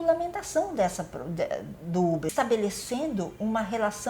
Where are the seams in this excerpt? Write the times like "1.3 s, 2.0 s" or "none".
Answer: 2.3 s